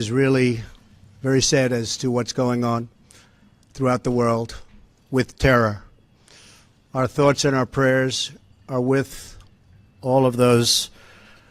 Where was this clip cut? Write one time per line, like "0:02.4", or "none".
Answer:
0:07.1

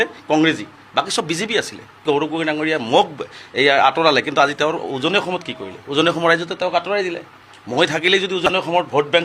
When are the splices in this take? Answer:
0:02.0

